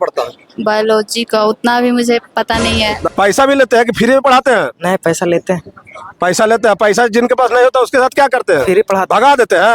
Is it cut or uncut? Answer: cut